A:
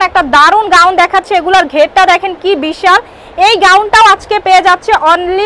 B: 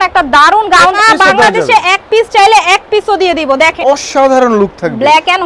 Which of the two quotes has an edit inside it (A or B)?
B